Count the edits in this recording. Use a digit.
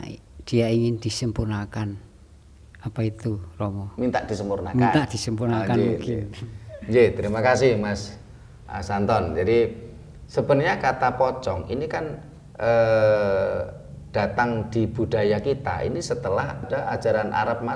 1